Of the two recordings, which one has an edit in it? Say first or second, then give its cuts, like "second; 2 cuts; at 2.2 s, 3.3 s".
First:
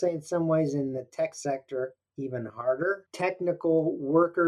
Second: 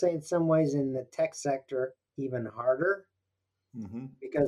first; 1 cut; at 3.1 s